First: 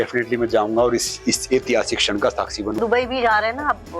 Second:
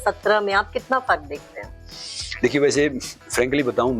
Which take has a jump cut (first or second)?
first